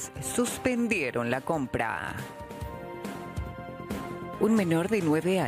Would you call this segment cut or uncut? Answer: cut